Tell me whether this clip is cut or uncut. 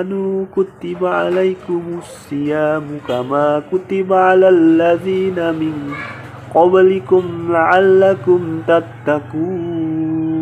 uncut